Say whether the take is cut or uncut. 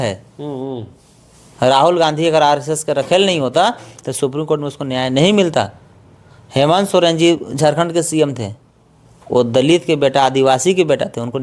uncut